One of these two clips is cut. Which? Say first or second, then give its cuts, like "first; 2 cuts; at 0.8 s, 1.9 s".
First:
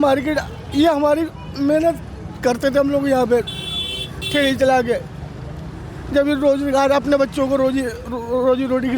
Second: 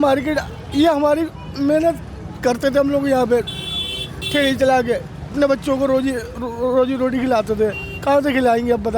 second; 1 cut; at 5.3 s